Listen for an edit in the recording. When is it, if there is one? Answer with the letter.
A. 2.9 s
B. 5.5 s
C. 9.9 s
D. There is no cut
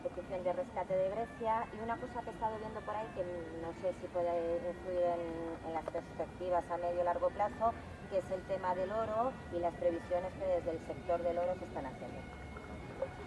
A